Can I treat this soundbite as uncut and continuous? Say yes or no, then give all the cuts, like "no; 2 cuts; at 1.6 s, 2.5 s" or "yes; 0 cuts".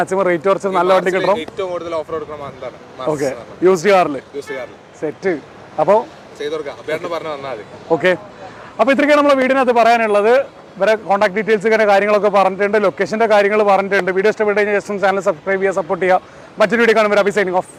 yes; 0 cuts